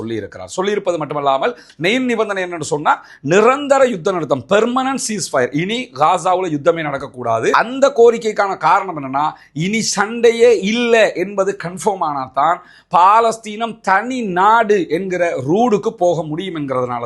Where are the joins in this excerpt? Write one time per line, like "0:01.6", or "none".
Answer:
0:01.6